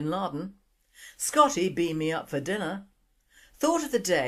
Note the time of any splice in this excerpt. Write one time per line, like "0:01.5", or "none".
0:01.4